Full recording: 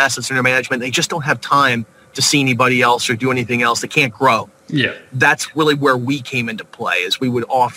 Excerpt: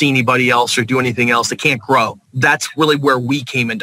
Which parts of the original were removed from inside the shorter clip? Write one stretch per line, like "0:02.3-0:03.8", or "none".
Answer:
0:04.6-0:05.0

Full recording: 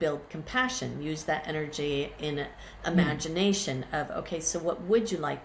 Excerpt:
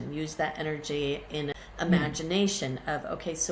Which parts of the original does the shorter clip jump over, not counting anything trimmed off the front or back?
0:02.5-0:02.7

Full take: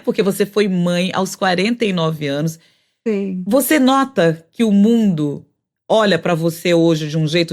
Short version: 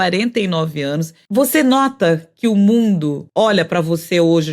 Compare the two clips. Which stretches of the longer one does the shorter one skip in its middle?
0:02.7-0:03.4
0:05.4-0:05.8

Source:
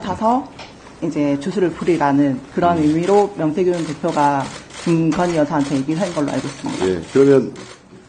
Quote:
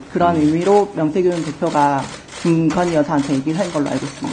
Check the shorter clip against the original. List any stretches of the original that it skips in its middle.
none

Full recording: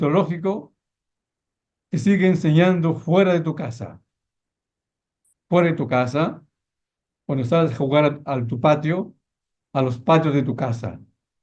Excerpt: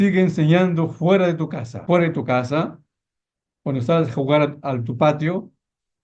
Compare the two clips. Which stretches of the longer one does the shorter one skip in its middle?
0:03.7-0:05.3

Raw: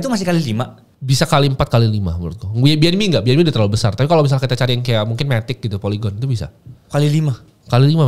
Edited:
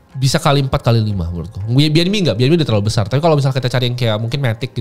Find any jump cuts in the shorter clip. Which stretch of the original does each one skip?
none

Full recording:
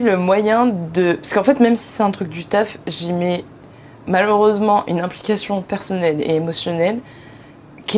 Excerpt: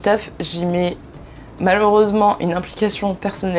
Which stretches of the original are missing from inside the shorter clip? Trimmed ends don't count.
none

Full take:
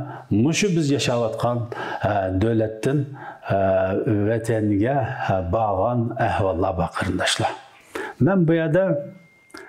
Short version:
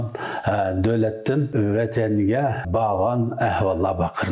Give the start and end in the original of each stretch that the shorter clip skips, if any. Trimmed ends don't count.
0:03.1-0:04.0
0:05.2-0:05.4

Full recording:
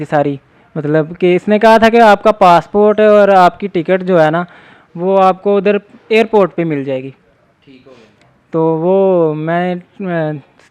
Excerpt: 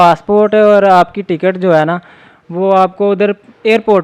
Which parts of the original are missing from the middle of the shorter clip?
none

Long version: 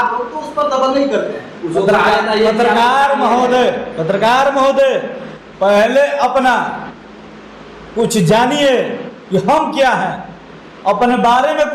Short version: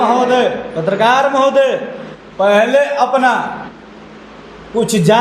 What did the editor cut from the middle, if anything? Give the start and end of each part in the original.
none

